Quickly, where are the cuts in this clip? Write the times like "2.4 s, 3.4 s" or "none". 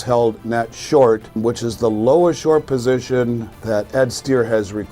1.4 s, 3.5 s